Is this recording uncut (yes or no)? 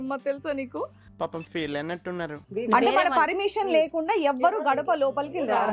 no